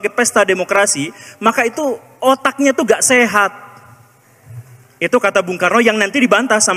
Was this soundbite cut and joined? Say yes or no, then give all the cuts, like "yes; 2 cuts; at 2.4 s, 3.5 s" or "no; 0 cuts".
no; 0 cuts